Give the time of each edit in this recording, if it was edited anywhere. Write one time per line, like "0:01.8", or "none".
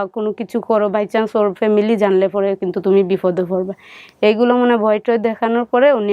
none